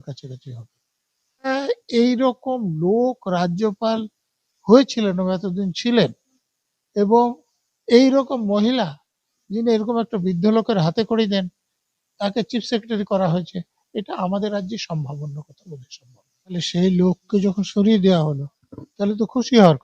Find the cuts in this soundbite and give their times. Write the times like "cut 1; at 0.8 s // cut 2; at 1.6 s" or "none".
cut 1; at 1.5 s // cut 2; at 16.6 s